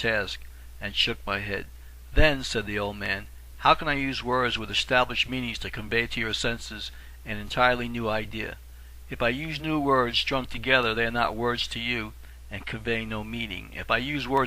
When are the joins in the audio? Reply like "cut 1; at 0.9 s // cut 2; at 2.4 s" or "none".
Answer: cut 1; at 13.3 s